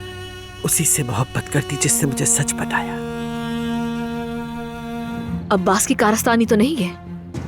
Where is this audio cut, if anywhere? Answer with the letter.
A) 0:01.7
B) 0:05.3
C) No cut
B